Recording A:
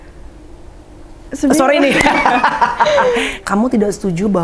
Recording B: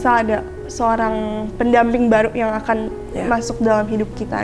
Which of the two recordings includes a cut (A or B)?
A